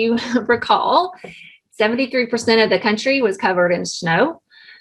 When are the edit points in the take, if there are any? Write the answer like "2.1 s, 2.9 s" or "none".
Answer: none